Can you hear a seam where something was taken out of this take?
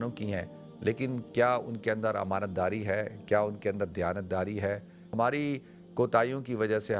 yes; 1 cut; at 5.1 s

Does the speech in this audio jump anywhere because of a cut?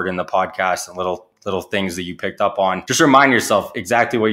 yes; 1 cut; at 2.8 s

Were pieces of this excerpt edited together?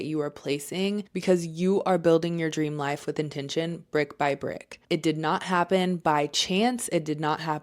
yes; 1 cut; at 1.1 s

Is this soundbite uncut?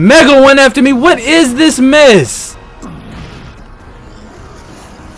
yes; 0 cuts

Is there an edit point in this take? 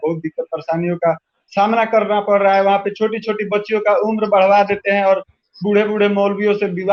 no; 0 cuts

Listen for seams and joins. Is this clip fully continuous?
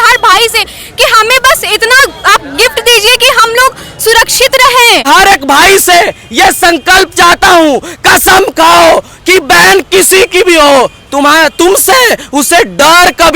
no; 1 cut; at 5.1 s

